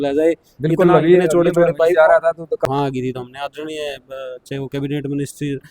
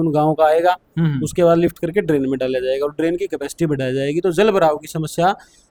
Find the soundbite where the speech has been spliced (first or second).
first